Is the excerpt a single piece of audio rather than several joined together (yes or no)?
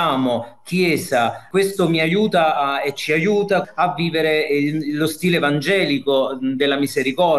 yes